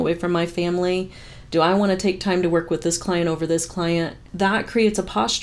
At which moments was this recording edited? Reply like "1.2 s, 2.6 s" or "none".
4.3 s